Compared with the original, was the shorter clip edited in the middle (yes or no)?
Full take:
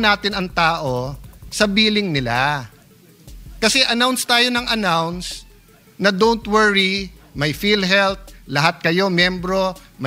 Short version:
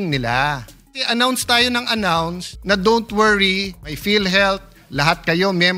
yes